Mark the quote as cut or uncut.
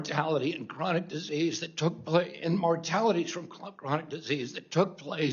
uncut